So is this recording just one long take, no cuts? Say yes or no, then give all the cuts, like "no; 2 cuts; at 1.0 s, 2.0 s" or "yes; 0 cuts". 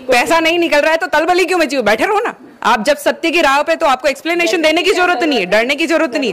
yes; 0 cuts